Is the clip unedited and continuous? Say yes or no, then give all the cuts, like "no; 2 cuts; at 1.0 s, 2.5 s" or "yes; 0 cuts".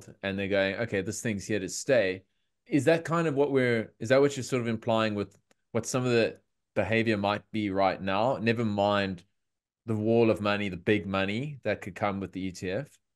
yes; 0 cuts